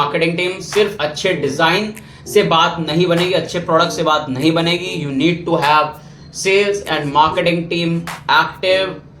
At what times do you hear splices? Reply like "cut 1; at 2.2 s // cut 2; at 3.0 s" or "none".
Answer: none